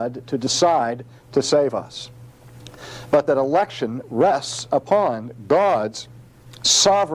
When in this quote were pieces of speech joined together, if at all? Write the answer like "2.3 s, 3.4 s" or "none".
4.4 s